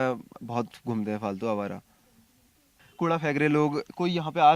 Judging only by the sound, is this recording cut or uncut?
cut